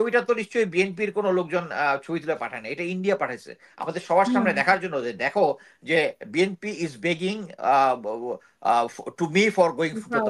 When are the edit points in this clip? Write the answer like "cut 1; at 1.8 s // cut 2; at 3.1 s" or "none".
none